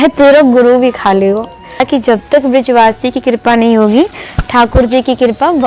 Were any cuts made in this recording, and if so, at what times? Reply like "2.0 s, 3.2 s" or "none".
1.8 s